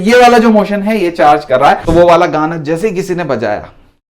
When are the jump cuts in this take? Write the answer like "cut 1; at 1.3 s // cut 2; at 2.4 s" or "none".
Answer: cut 1; at 1.8 s